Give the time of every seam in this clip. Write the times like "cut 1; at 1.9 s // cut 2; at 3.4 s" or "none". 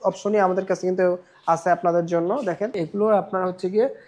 cut 1; at 2.7 s